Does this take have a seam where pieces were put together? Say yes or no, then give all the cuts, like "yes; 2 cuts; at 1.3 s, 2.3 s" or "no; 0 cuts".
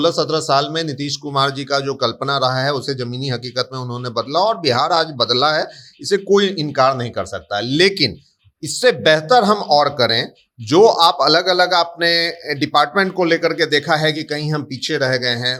no; 0 cuts